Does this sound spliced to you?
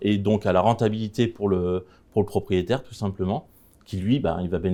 no; 0 cuts

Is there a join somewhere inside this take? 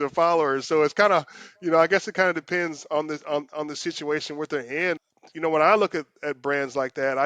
yes; 1 cut; at 5.0 s

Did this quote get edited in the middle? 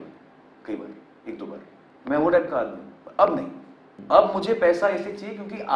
no; 0 cuts

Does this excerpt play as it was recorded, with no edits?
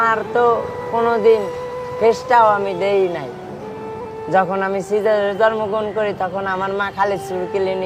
yes; 0 cuts

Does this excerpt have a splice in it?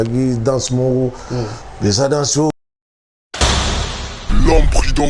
yes; 1 cut; at 2.5 s

